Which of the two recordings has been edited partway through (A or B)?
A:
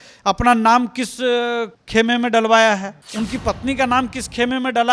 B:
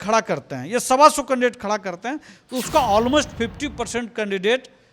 A